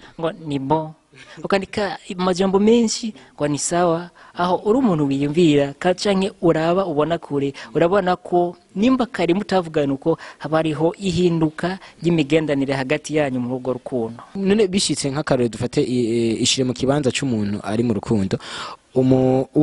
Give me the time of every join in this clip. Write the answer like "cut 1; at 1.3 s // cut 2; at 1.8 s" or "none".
cut 1; at 14.4 s

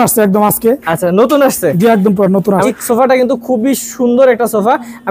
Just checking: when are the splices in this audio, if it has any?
cut 1; at 2.7 s

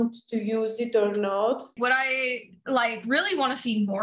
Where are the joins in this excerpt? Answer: cut 1; at 1.7 s

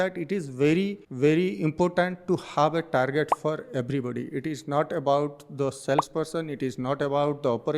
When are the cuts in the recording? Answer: cut 1; at 1.0 s

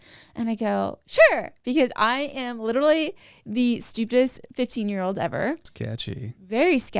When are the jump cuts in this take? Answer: cut 1; at 5.7 s

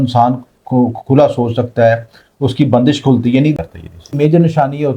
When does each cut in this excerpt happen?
cut 1; at 3.5 s

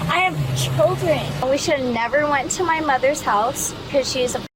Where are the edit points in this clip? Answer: cut 1; at 1.4 s

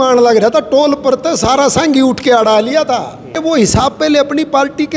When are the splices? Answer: cut 1; at 3.3 s

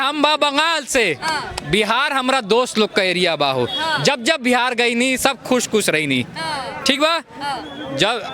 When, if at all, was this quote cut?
none

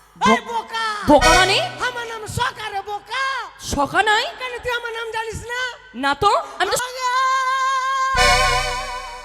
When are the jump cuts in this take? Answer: cut 1; at 6.8 s

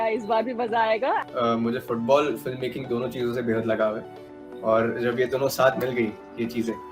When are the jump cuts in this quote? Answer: cut 1; at 1.2 s

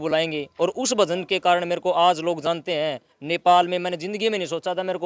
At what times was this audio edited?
none

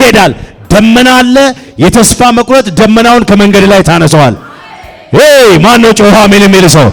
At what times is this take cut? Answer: none

